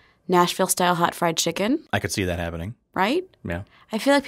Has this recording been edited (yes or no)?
yes